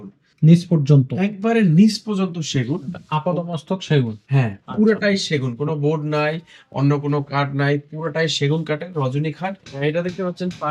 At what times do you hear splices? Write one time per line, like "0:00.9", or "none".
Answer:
0:09.6